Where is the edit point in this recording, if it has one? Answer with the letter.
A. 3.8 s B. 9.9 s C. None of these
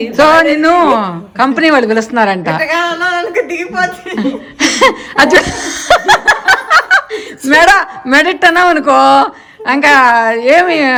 C